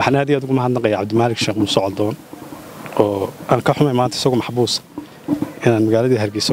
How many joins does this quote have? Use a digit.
0